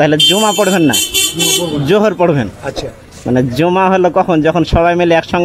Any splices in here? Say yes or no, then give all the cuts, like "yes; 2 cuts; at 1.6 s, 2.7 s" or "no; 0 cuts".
no; 0 cuts